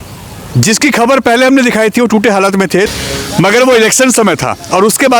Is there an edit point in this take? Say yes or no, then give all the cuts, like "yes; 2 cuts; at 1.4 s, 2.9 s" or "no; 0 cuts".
yes; 1 cut; at 2.9 s